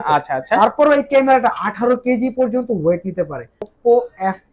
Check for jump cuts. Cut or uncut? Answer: cut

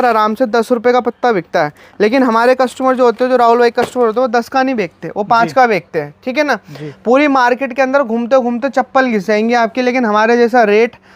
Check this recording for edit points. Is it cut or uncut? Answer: uncut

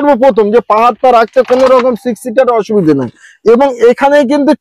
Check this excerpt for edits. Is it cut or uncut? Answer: uncut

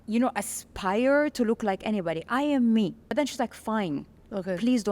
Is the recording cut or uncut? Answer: uncut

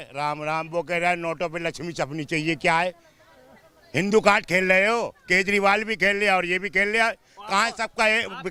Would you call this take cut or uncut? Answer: uncut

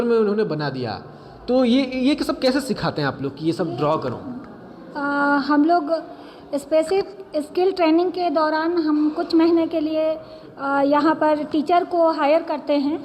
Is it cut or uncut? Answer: uncut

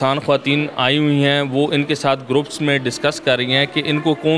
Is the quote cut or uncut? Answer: uncut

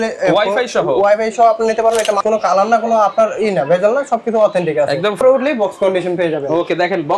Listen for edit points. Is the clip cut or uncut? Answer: cut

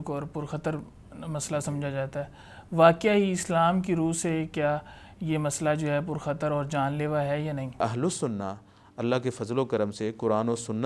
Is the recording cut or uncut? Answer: cut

